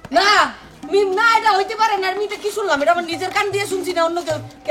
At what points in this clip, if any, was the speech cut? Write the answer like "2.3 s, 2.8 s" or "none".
none